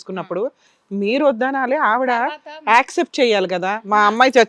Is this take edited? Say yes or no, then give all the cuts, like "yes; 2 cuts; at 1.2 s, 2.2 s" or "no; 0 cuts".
no; 0 cuts